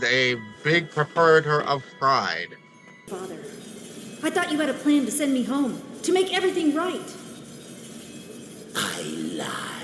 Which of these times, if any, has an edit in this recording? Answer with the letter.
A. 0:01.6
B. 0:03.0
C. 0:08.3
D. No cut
B